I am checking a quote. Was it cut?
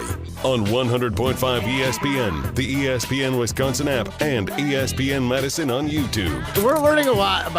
yes; 1 cut; at 6.4 s

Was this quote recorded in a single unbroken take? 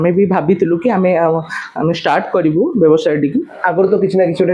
no; 1 cut; at 3.6 s

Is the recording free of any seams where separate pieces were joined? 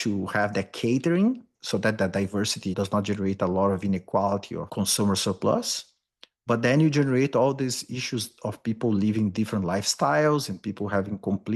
no; 2 cuts; at 1.6 s, 4.6 s

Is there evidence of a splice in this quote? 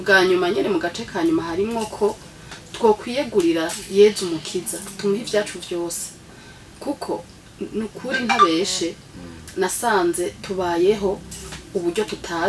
no; 0 cuts

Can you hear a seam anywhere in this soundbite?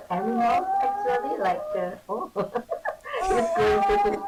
no; 0 cuts

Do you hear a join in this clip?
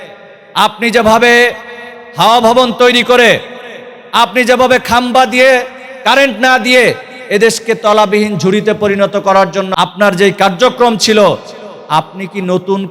yes; 1 cut; at 9.7 s

